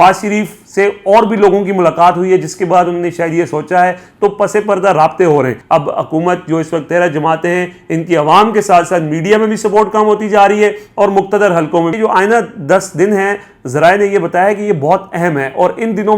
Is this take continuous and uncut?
no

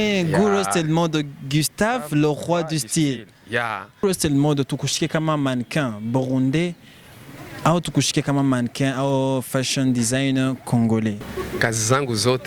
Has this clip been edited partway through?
yes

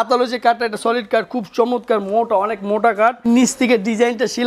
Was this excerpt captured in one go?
no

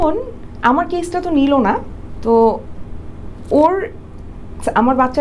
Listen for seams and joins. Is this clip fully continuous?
yes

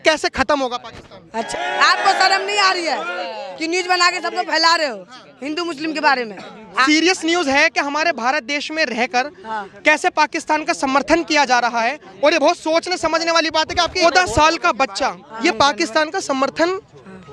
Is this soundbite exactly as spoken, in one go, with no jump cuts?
no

